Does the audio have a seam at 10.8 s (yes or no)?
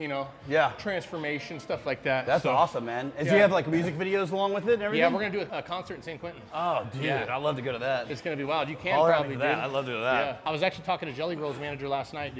no